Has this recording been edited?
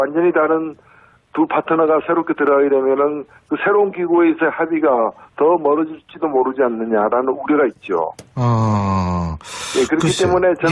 no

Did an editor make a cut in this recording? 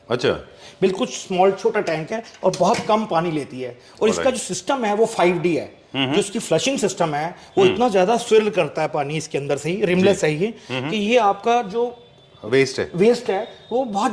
no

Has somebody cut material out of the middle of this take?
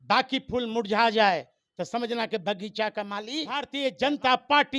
yes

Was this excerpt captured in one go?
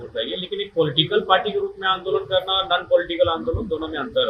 yes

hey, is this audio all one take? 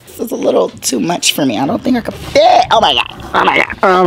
yes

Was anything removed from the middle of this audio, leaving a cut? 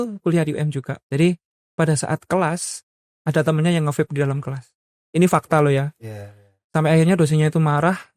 yes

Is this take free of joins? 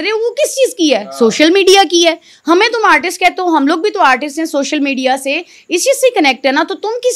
yes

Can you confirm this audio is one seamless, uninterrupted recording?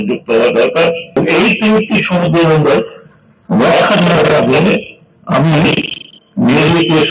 no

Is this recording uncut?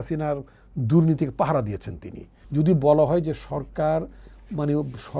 no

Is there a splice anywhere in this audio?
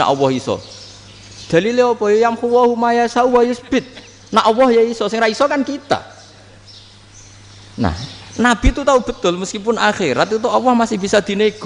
no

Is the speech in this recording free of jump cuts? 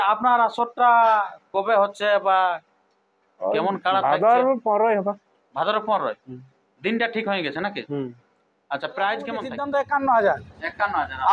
no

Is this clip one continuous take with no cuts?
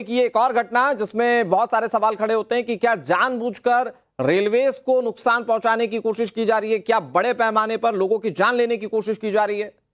no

